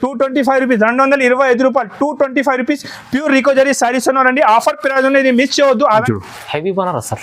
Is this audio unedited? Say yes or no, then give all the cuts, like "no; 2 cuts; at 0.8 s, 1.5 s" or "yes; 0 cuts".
no; 1 cut; at 6.0 s